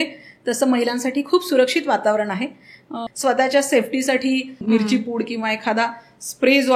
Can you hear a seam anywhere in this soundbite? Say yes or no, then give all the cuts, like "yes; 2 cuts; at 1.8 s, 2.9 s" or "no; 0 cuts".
yes; 2 cuts; at 3.0 s, 4.6 s